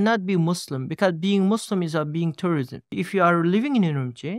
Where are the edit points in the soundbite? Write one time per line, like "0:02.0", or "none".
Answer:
0:02.9

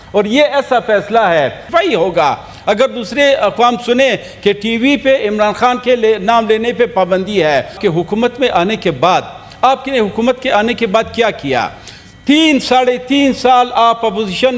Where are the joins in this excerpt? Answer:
0:01.6
0:07.8

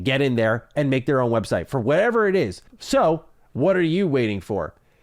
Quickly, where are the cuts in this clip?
0:02.7

